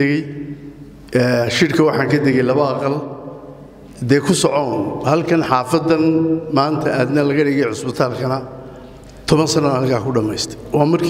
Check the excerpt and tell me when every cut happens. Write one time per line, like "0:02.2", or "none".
none